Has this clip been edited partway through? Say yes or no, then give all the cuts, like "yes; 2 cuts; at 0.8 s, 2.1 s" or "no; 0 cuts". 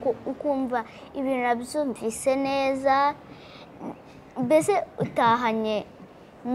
no; 0 cuts